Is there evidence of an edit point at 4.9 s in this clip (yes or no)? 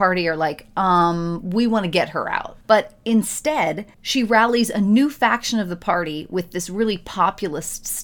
no